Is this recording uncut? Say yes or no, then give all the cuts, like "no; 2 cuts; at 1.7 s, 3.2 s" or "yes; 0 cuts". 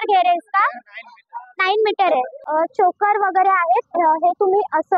no; 1 cut; at 2.4 s